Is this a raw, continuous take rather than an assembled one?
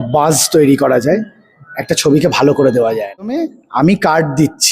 no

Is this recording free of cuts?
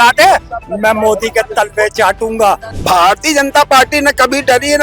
no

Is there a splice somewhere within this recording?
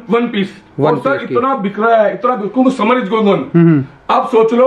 no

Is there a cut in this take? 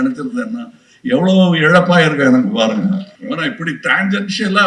yes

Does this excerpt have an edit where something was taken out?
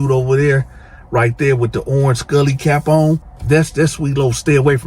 yes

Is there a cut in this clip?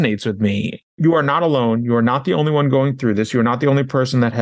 yes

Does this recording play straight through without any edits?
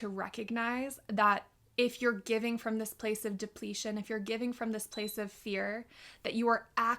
no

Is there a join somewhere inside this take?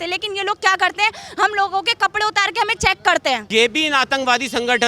yes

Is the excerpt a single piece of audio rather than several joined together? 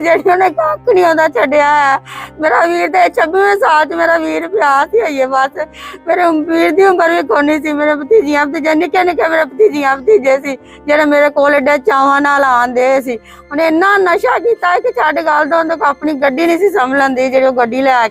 yes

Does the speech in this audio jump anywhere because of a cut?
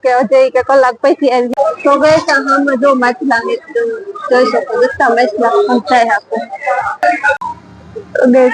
yes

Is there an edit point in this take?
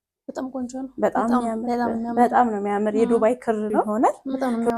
yes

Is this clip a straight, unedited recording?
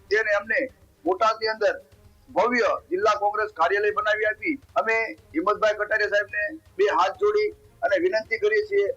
no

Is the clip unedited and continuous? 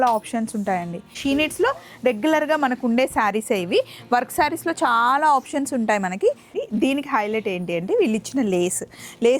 no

